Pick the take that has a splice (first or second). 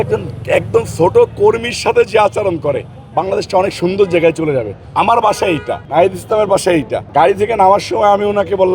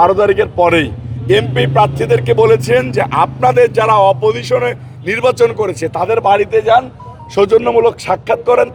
first